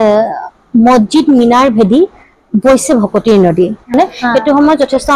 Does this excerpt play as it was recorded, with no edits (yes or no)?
no